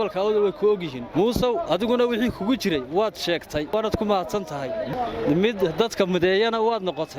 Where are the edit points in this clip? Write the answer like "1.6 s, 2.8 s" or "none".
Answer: 1.0 s, 3.7 s, 4.9 s